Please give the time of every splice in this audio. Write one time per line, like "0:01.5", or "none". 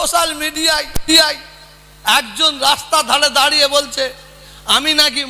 0:00.9